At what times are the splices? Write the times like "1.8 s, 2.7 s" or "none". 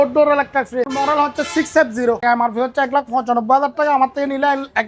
0.9 s, 2.2 s

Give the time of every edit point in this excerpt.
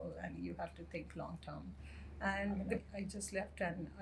2.8 s

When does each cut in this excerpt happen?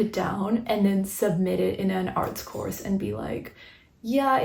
none

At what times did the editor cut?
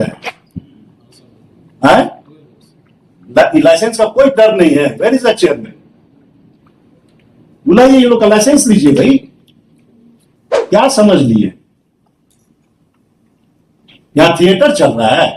10.6 s

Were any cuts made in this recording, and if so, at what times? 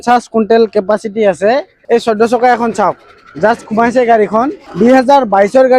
1.7 s, 4.6 s

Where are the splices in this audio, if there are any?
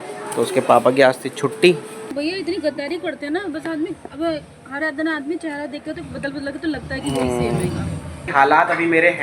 2.0 s, 8.3 s

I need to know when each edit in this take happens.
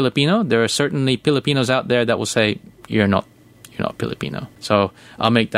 4.5 s

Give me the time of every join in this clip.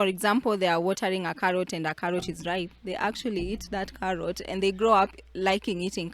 none

